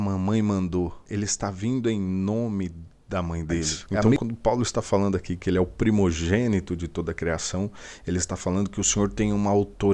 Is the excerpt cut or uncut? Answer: cut